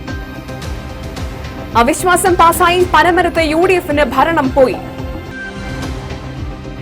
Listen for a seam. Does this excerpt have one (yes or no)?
yes